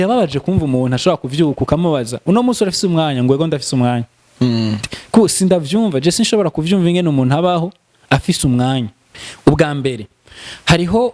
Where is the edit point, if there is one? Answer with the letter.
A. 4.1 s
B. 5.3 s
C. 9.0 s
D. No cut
C